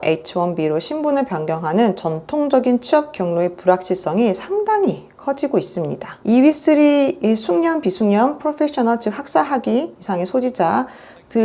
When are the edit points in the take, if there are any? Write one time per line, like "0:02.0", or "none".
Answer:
0:06.0